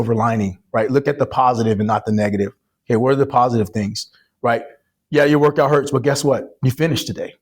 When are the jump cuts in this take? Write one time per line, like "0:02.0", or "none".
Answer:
none